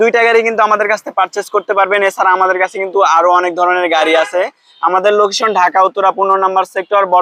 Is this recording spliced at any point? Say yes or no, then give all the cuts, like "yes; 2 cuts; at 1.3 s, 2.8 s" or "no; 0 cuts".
no; 0 cuts